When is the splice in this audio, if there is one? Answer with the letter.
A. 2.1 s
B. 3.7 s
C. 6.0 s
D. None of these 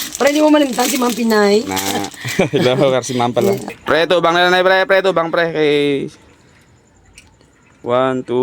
B